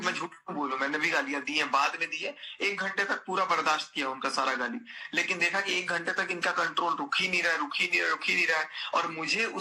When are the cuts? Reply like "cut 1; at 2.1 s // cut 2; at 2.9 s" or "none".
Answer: none